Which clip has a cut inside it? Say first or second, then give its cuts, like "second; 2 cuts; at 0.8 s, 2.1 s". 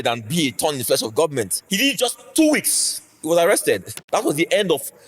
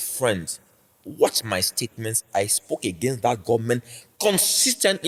first; 2 cuts; at 1.6 s, 3.9 s